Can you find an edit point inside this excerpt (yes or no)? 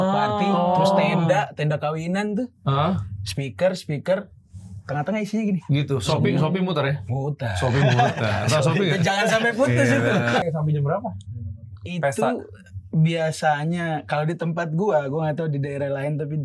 yes